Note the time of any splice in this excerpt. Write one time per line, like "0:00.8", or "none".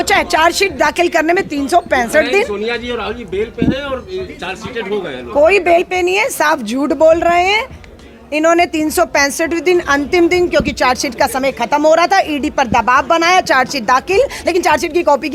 none